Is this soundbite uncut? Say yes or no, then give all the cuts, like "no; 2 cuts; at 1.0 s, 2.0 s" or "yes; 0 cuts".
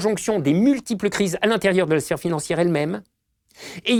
yes; 0 cuts